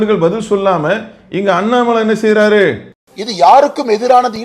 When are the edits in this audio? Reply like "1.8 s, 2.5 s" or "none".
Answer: 2.9 s